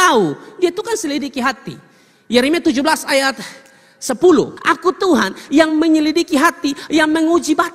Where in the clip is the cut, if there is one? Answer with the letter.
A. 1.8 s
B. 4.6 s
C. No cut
B